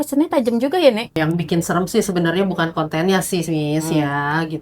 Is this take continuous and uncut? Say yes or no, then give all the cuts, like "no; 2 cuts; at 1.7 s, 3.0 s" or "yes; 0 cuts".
no; 1 cut; at 1.2 s